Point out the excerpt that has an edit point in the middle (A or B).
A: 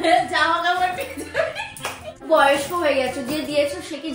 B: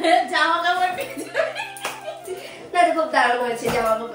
A